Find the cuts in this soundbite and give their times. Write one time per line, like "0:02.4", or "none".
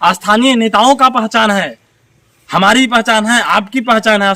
none